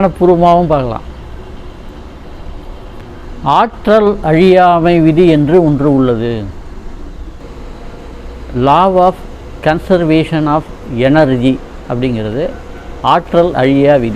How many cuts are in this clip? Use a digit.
1